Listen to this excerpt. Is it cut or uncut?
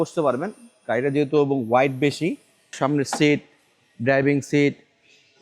cut